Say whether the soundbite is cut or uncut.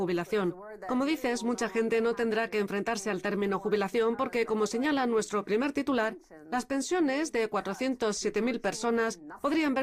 cut